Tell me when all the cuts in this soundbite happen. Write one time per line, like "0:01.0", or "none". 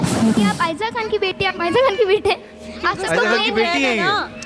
none